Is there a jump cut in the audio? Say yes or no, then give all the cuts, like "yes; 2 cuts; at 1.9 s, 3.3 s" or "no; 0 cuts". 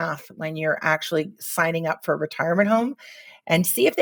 no; 0 cuts